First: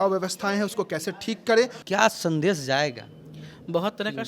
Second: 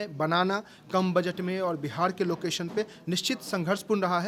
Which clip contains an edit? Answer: first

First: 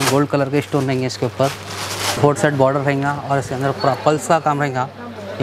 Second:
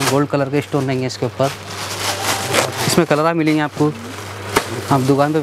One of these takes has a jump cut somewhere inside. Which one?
first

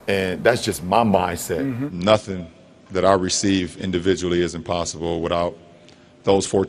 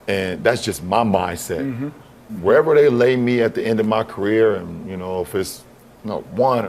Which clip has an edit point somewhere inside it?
first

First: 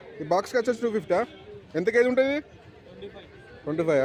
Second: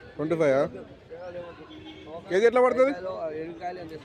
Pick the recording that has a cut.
second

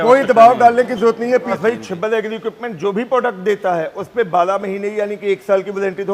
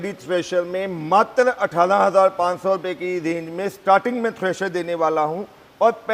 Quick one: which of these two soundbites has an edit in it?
first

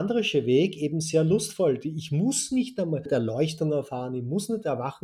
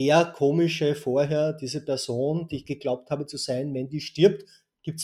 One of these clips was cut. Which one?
first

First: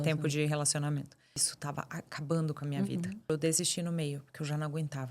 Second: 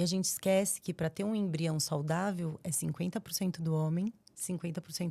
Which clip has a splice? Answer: first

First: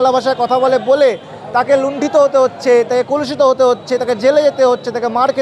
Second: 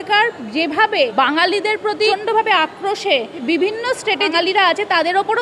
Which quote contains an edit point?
second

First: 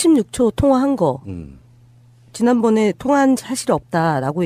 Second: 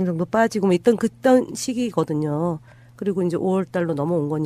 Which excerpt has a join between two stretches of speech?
second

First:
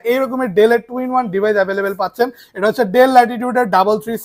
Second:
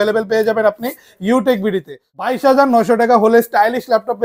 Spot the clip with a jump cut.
second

